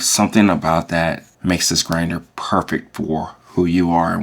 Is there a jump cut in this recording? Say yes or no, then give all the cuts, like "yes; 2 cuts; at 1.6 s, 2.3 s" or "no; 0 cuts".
yes; 1 cut; at 1.3 s